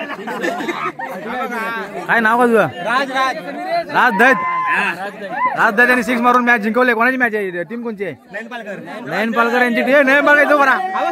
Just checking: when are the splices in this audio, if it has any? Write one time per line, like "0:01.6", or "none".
none